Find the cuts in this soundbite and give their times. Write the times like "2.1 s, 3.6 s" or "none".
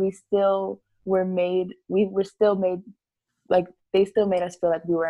none